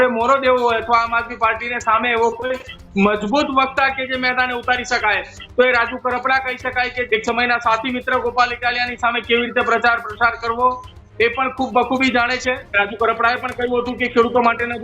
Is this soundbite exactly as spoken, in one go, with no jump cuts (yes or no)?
no